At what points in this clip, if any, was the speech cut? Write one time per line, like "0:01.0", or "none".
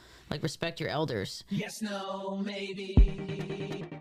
0:01.6

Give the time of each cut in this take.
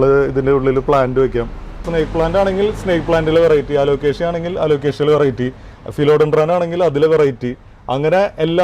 0:01.9

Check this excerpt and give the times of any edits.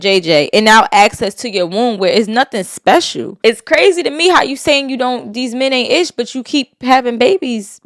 0:03.2

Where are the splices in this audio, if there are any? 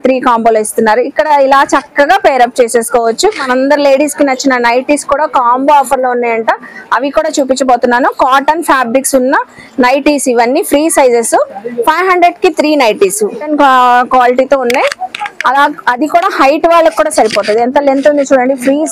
none

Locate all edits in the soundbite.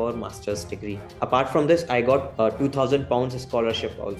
0:02.3

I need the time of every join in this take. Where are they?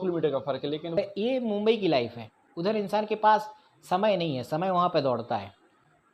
0:01.0

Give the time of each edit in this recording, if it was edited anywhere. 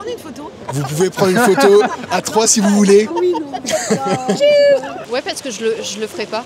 0:03.1
0:05.0

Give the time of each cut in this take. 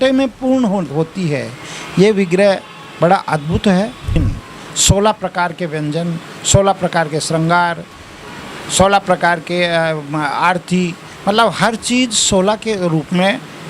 0:04.2

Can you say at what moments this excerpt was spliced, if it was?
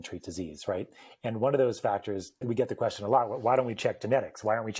0:02.5

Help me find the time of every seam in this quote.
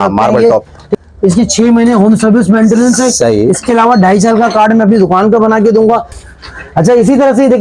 0:00.9
0:06.2

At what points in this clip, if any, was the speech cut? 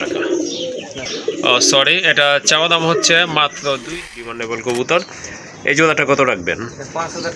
0:04.1

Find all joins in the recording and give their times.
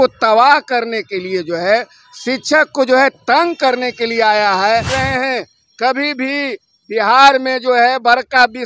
0:04.9

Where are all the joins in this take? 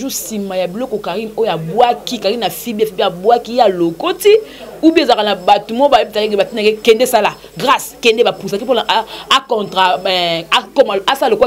none

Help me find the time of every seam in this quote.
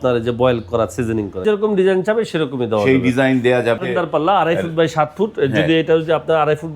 0:01.4
0:03.8

